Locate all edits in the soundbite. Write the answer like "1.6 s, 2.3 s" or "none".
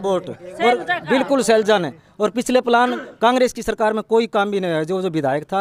none